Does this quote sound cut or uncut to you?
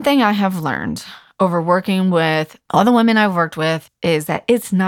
cut